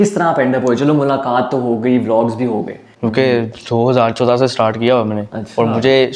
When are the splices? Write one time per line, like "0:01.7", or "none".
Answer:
0:02.9